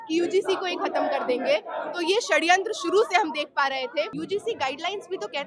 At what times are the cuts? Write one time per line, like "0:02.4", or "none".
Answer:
0:04.2